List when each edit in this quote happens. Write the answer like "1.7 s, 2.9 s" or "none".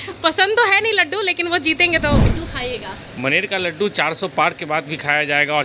2.3 s